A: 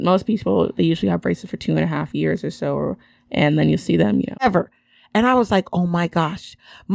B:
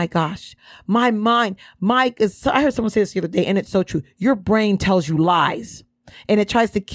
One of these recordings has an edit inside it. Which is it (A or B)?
A